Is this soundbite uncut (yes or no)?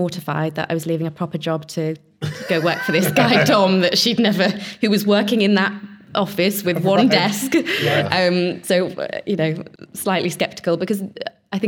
yes